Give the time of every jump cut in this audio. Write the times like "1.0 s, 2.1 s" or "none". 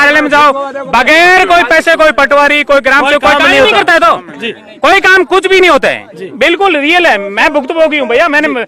none